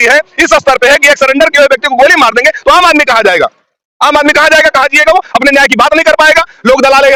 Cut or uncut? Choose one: uncut